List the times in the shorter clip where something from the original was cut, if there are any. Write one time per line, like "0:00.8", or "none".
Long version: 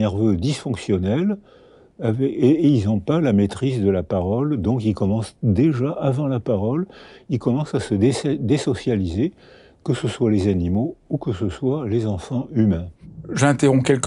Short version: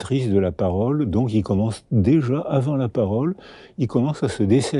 none